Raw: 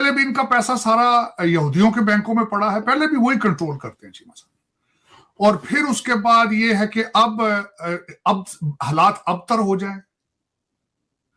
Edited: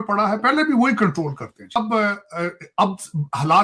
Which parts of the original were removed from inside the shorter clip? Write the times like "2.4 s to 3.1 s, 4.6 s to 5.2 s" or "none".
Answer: 4.2 s to 7.2 s